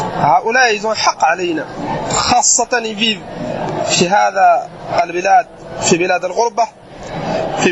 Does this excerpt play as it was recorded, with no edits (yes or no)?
no